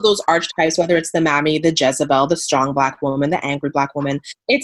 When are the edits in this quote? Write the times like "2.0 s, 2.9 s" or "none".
none